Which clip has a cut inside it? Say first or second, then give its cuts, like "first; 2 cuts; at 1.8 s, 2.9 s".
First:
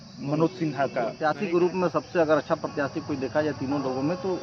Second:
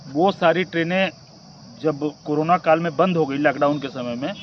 first; 1 cut; at 1.5 s